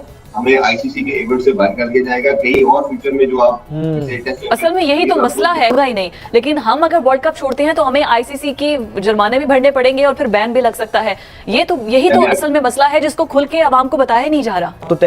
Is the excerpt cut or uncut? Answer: uncut